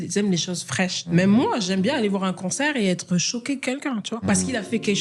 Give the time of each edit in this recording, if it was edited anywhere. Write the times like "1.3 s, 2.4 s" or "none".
1.0 s, 4.2 s